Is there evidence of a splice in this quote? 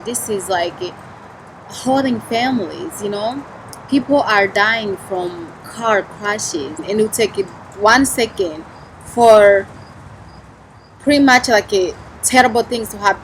yes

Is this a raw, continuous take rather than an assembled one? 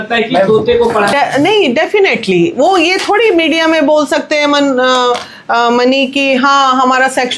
yes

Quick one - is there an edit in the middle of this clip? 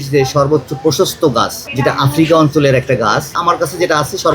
yes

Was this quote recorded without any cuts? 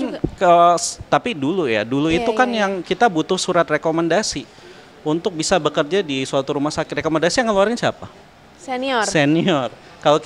yes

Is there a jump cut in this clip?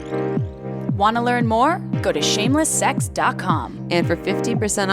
yes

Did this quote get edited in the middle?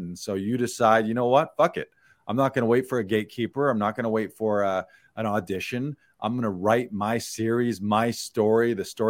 no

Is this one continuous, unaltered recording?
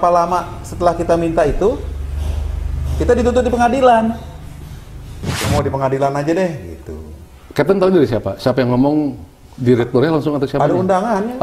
no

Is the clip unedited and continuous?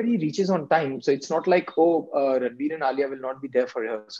yes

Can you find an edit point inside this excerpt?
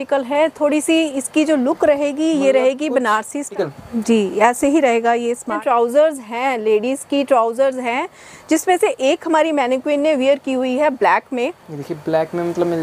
yes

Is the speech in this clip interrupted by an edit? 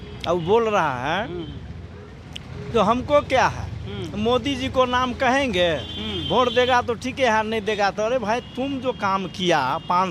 no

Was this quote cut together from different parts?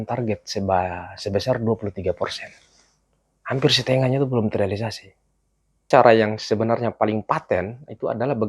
yes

